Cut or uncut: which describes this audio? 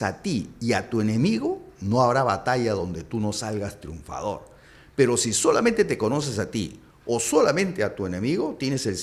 uncut